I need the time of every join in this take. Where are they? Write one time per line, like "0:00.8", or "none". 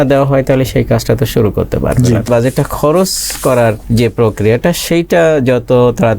0:02.3
0:03.8